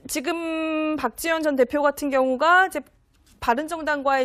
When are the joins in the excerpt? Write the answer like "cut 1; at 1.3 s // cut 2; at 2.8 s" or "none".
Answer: cut 1; at 3.0 s

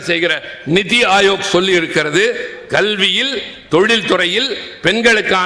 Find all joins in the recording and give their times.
none

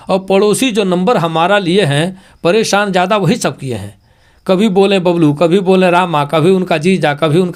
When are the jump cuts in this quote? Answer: none

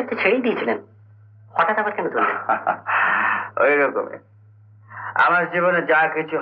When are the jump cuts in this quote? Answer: none

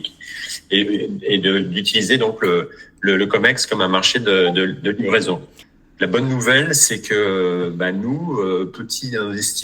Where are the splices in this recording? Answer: cut 1; at 5.5 s

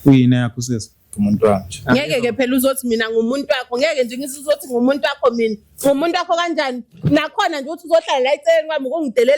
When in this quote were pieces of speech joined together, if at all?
cut 1; at 1.0 s

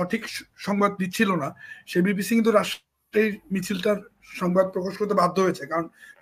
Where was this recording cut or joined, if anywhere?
none

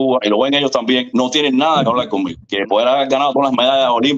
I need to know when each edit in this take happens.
cut 1; at 2.5 s

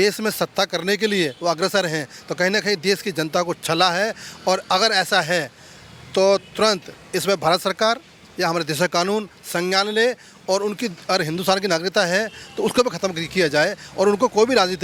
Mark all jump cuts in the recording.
none

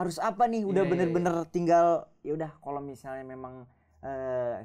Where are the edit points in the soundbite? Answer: none

